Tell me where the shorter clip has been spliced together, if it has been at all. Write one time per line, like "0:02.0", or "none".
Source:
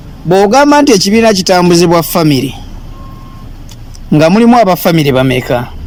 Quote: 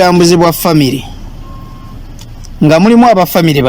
none